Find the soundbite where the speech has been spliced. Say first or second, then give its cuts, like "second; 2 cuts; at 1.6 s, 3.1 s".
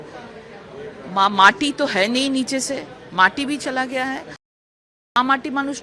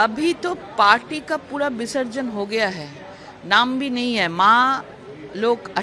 first; 1 cut; at 4.5 s